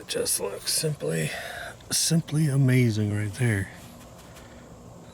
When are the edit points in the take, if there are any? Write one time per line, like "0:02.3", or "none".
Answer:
none

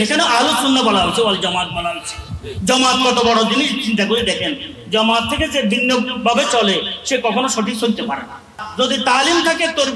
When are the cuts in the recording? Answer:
0:08.7

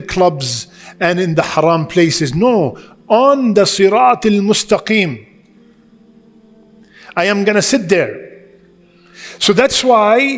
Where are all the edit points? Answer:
none

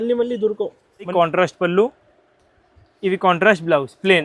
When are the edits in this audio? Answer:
0:01.1

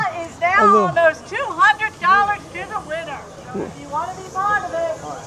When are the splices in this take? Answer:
none

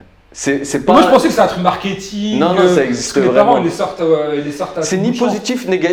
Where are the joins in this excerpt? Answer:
none

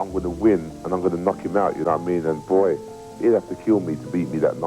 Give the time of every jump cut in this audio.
0:01.8

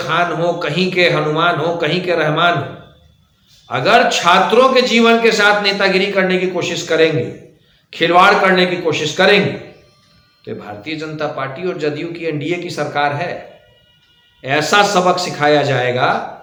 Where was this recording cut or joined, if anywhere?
none

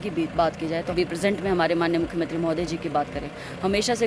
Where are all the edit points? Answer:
0:00.9

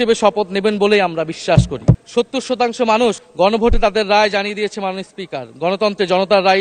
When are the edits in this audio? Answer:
0:02.0

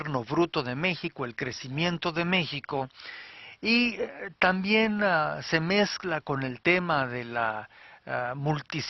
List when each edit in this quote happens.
none

